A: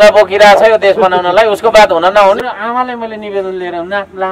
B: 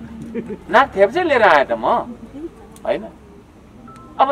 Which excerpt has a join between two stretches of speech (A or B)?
A